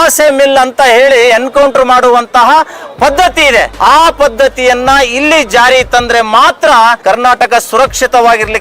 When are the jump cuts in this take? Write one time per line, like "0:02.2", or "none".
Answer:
0:03.7
0:07.0